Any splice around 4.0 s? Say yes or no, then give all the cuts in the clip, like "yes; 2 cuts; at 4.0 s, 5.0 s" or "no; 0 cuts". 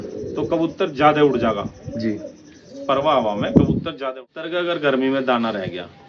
yes; 1 cut; at 4.0 s